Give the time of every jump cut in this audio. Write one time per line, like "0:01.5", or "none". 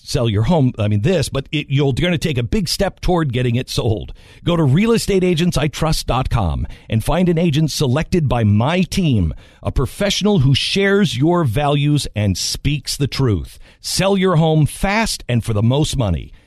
none